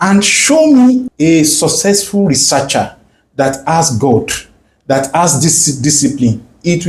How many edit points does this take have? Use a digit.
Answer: 1